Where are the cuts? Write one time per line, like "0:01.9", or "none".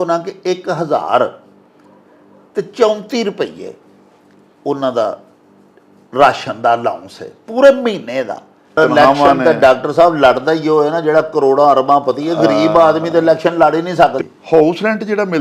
0:08.8
0:14.2